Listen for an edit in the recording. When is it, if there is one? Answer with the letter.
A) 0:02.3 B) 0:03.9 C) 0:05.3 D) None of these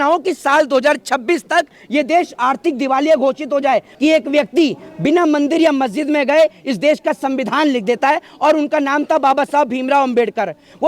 B